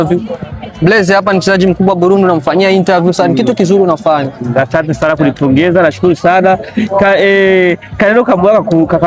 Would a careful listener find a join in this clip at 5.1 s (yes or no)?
no